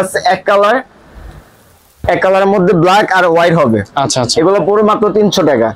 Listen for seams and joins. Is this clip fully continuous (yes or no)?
yes